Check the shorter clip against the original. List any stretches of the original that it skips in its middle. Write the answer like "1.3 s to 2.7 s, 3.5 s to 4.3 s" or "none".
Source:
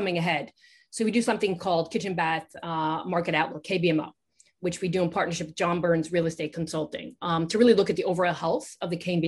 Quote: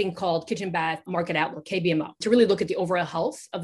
2.5 s to 3.0 s, 4.2 s to 7.5 s

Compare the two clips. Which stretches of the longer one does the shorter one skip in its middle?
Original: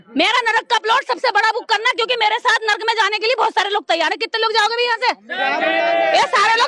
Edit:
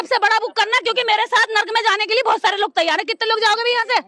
none

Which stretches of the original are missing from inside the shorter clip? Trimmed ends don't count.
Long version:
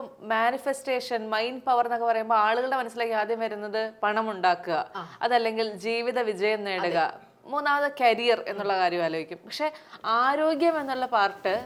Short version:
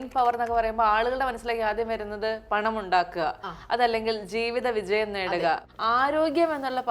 7.2 s to 10.0 s

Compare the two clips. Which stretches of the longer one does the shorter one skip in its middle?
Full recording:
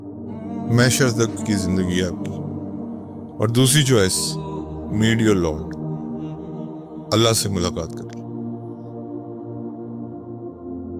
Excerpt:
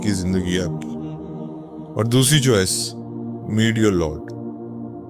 5.6 s to 9.3 s

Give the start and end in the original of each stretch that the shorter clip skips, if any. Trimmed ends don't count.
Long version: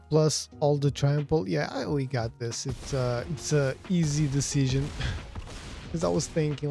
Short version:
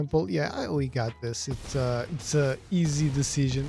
none

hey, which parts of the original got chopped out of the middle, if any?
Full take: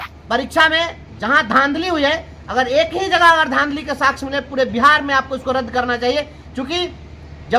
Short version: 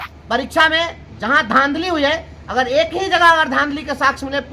none

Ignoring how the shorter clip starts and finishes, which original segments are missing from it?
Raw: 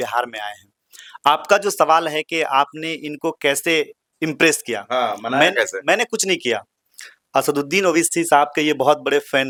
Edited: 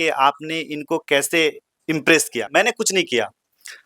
4.8 s to 5.8 s

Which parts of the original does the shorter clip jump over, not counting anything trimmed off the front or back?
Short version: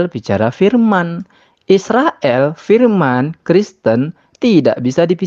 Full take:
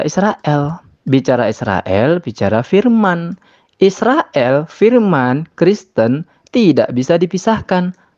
none

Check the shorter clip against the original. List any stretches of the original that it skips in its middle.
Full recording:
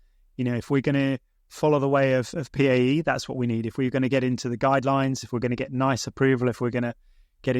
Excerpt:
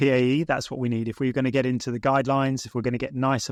none

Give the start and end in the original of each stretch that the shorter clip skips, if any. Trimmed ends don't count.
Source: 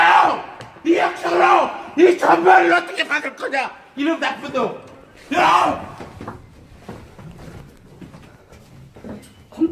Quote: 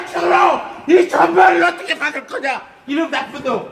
none

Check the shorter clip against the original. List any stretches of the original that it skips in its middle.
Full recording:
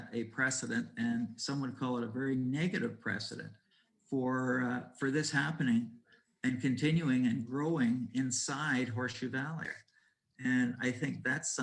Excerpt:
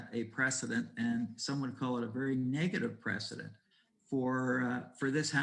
none

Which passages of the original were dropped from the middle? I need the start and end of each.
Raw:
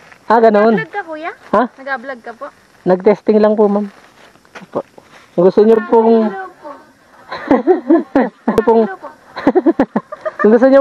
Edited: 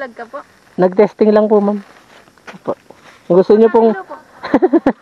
5.8 s to 8.6 s

